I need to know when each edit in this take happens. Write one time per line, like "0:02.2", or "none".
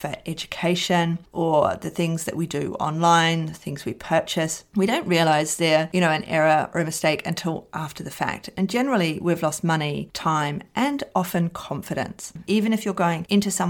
0:12.3